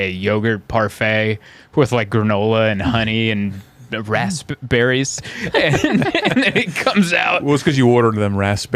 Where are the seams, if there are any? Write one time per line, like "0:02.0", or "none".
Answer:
none